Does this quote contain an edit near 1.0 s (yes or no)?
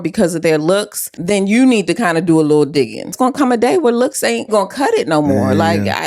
yes